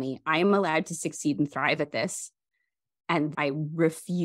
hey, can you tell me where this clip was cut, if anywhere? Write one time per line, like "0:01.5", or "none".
0:03.3